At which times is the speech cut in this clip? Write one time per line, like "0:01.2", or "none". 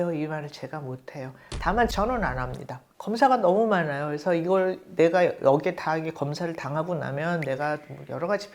0:01.9
0:03.0